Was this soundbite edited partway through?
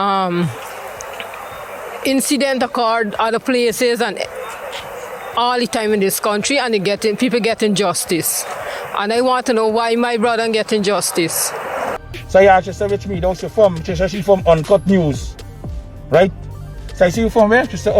yes; 1 cut; at 12.0 s

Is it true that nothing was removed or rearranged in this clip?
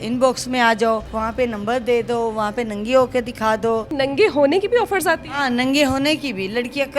no; 2 cuts; at 1.1 s, 3.9 s

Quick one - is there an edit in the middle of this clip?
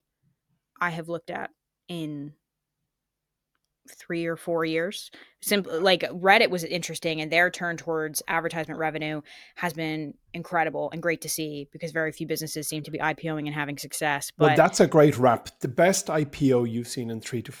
no; 0 cuts

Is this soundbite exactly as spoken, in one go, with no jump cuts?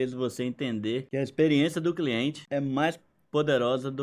no; 2 cuts; at 1.1 s, 2.4 s

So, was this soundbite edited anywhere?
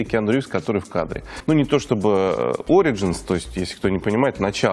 yes; 1 cut; at 1.3 s

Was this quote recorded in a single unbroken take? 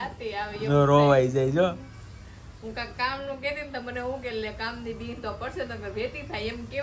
yes; 0 cuts

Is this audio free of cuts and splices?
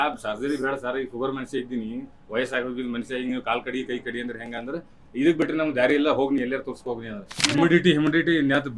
no; 1 cut; at 7.4 s

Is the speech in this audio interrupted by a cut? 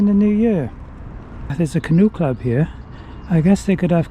yes; 1 cut; at 1.5 s

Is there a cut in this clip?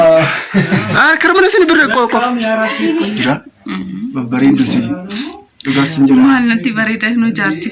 yes; 1 cut; at 3.2 s

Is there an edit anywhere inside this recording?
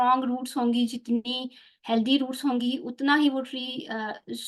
no; 0 cuts

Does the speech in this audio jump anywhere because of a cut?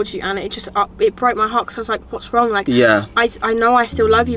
no; 0 cuts

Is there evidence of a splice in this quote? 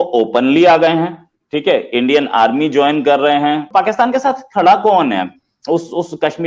yes; 1 cut; at 3.7 s

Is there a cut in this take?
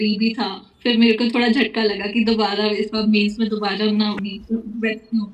yes; 1 cut; at 4.2 s

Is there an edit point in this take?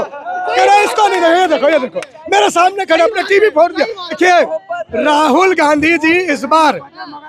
yes; 1 cut; at 4.2 s

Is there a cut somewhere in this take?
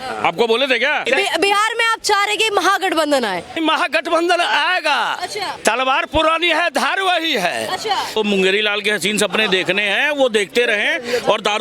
yes; 4 cuts; at 1.0 s, 3.5 s, 5.5 s, 8.2 s

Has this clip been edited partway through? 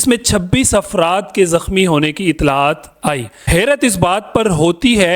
yes; 1 cut; at 3.3 s

